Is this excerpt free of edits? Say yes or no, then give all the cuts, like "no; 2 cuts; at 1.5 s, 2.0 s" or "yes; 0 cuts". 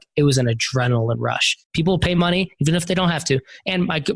no; 1 cut; at 1.6 s